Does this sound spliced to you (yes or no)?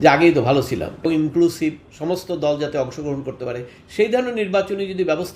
yes